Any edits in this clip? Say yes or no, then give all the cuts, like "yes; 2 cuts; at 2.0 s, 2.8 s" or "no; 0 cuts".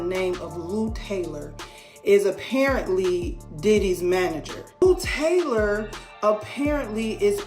yes; 1 cut; at 4.8 s